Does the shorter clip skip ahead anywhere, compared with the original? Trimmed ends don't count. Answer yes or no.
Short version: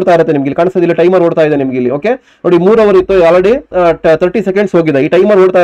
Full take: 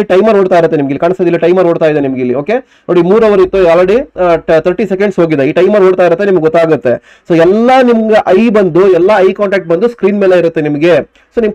no